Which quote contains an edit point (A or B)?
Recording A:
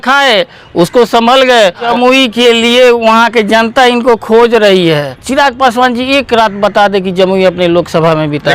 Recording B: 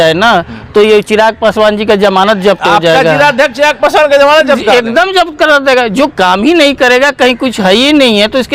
A